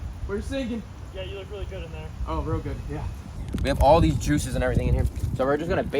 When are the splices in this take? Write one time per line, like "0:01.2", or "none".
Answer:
0:03.3

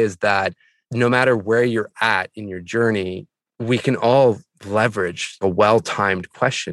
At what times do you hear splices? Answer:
none

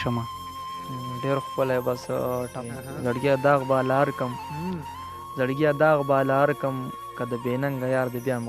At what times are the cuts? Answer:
0:02.6

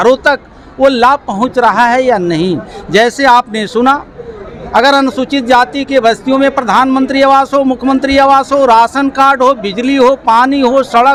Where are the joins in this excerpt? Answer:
none

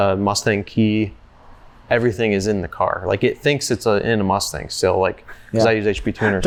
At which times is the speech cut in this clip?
none

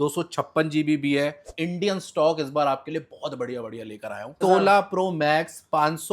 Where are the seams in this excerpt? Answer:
0:01.5
0:04.4

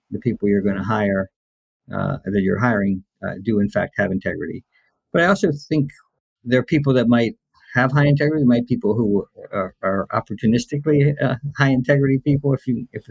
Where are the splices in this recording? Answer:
none

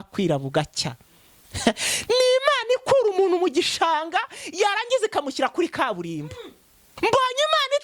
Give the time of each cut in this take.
0:06.9

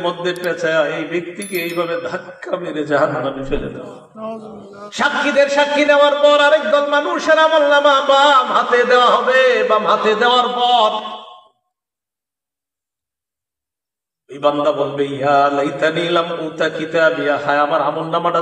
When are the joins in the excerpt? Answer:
0:04.8

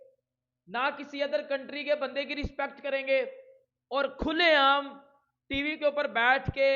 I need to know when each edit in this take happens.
none

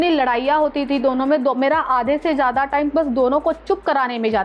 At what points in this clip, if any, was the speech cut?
none

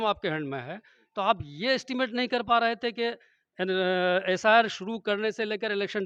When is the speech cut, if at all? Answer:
none

